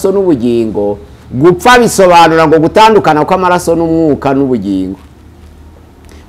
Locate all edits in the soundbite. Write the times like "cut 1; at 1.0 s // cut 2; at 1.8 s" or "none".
none